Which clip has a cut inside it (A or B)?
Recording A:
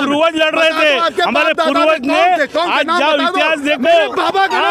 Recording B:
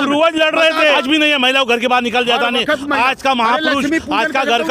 B